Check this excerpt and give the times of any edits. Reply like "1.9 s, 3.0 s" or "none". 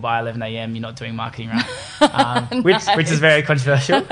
none